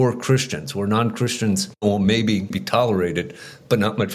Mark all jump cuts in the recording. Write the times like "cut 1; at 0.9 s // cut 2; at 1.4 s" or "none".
cut 1; at 1.8 s // cut 2; at 2.6 s